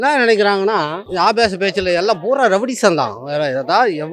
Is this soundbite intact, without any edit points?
no; 1 cut; at 1.0 s

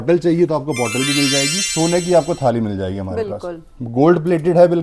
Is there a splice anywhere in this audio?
yes; 1 cut; at 1.6 s

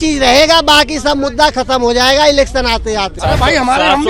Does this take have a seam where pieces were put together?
yes; 1 cut; at 3.2 s

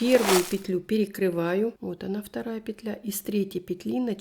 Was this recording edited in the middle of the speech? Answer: yes; 1 cut; at 1.9 s

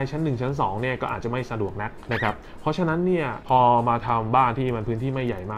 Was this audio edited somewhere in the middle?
yes; 1 cut; at 2.0 s

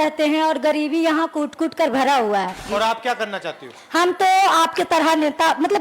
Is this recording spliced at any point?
yes; 1 cut; at 2.6 s

